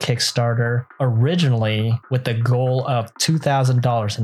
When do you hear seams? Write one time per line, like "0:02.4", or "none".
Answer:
0:00.9
0:02.0